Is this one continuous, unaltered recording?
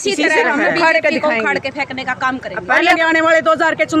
no; 1 cut; at 3.0 s

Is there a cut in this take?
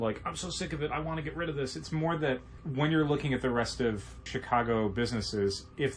yes; 2 cuts; at 2.6 s, 4.3 s

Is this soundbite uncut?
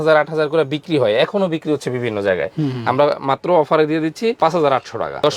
yes; 0 cuts

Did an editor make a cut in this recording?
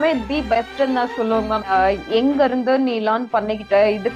yes; 1 cut; at 1.6 s

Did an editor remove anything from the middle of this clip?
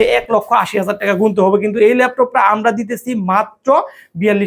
no; 0 cuts

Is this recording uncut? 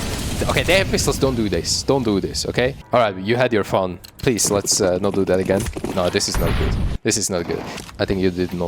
no; 3 cuts; at 2.8 s, 5.8 s, 7.7 s

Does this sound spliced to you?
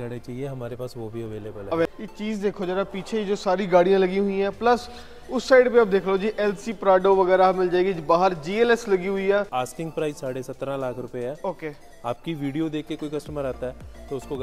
yes; 2 cuts; at 1.9 s, 9.5 s

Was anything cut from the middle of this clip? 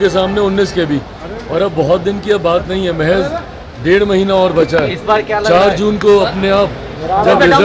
no; 0 cuts

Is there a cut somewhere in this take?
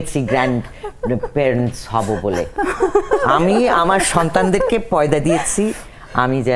no; 0 cuts

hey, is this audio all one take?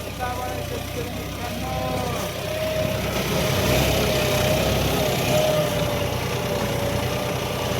no; 1 cut; at 3.5 s

